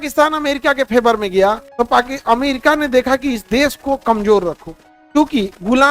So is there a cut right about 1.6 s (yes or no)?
yes